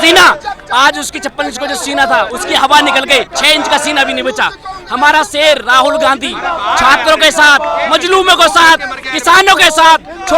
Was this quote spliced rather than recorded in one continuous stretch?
no; 0 cuts

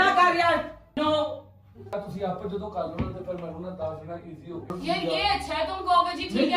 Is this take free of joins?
no; 3 cuts; at 1.0 s, 1.9 s, 4.7 s

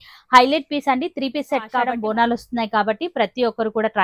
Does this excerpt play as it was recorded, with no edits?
no; 1 cut; at 1.9 s

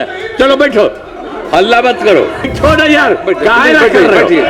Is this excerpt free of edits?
no; 1 cut; at 2.5 s

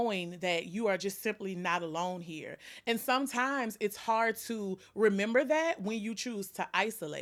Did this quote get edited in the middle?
no; 0 cuts

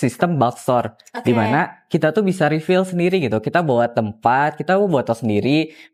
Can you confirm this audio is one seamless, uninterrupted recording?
yes; 0 cuts

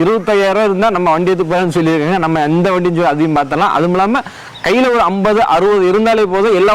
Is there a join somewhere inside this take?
no; 0 cuts

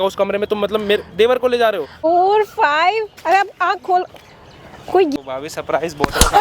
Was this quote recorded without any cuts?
no; 2 cuts; at 2.0 s, 5.1 s

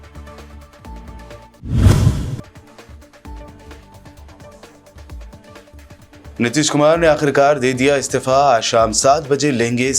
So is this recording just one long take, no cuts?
no; 1 cut; at 1.0 s

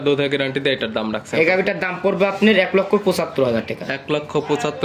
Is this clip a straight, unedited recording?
yes; 0 cuts

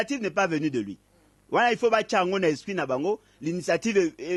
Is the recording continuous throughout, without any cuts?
yes; 0 cuts

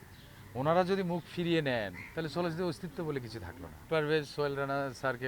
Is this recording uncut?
no; 1 cut; at 3.8 s

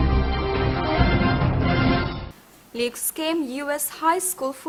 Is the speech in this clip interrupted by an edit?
no; 0 cuts

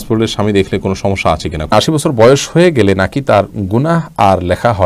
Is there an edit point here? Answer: yes; 1 cut; at 1.7 s

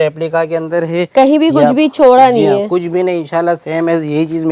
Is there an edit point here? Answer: no; 0 cuts

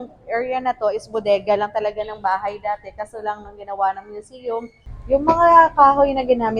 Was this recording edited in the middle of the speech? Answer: yes; 1 cut; at 4.8 s

